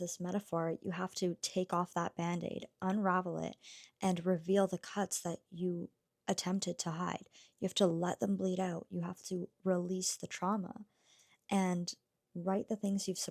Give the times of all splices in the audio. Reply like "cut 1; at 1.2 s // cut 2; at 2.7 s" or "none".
none